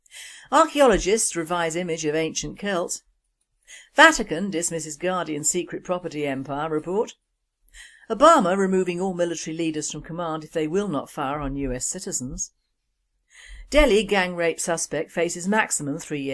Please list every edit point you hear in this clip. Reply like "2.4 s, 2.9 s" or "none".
14.1 s